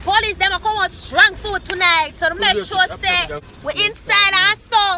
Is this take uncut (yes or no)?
no